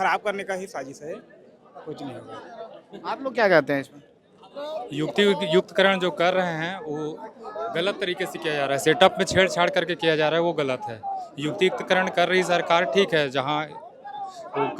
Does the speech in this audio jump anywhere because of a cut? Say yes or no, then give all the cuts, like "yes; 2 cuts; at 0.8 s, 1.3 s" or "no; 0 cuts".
no; 0 cuts